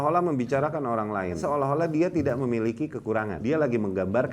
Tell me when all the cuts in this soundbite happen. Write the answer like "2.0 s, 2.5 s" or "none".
1.4 s, 3.3 s